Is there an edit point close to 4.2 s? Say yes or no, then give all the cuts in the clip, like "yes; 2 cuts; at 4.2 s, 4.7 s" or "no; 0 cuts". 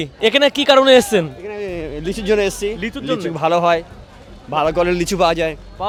no; 0 cuts